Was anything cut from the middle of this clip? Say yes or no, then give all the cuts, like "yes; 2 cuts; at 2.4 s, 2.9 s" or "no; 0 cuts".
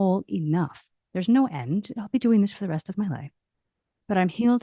no; 0 cuts